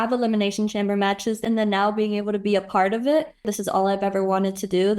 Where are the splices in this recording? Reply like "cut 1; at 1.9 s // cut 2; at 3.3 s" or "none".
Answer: cut 1; at 1.4 s // cut 2; at 3.5 s

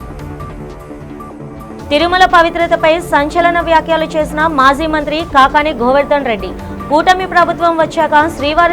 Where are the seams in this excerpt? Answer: cut 1; at 1.9 s

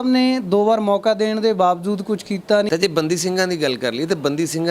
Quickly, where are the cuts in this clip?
cut 1; at 2.7 s

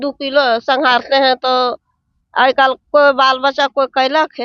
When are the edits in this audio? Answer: none

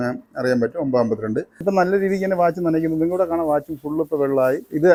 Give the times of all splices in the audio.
none

